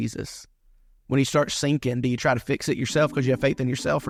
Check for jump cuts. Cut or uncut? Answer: uncut